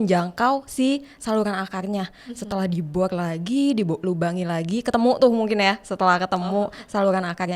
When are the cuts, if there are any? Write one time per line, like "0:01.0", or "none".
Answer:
none

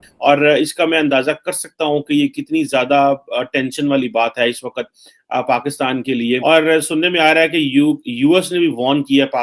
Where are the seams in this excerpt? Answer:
0:06.4

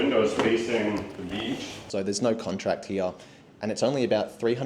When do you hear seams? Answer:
0:01.8

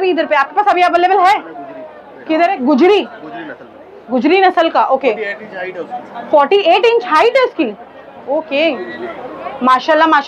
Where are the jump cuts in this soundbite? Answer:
none

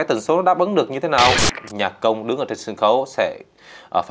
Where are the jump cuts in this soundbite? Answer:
0:01.5

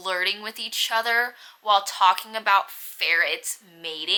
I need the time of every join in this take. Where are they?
none

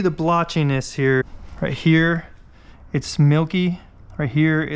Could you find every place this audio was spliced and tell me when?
0:01.4

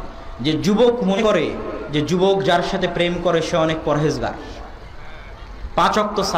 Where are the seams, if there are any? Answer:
0:01.2

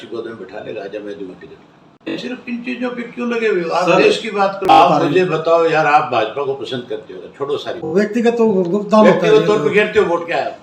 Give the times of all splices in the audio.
0:02.1
0:04.7
0:07.8

